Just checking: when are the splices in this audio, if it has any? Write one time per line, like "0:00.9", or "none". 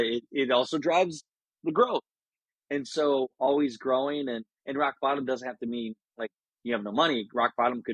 none